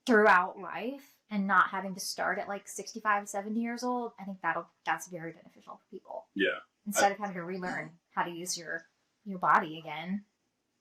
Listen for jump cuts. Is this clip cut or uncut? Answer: uncut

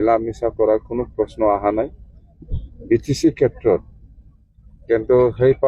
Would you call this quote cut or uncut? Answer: uncut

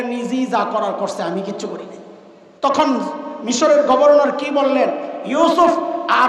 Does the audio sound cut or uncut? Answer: cut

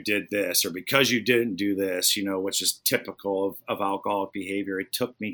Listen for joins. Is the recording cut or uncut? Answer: uncut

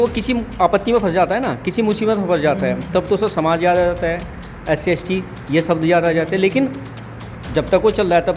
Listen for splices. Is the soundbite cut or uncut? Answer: uncut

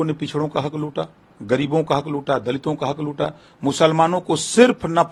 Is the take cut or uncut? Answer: uncut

